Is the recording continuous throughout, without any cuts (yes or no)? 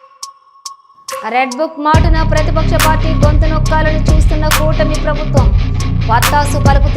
no